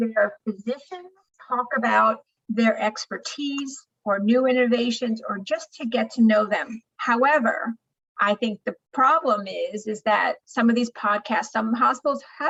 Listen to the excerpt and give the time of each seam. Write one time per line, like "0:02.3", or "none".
none